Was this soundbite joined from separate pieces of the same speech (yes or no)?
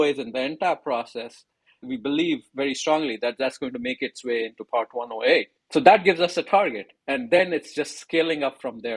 yes